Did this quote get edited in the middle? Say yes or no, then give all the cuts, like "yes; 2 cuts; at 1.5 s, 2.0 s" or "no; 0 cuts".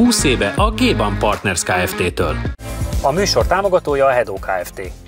no; 0 cuts